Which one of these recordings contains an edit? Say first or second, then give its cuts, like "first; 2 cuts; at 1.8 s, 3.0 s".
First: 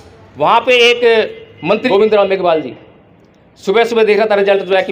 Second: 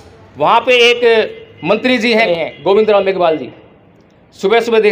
first; 1 cut; at 1.8 s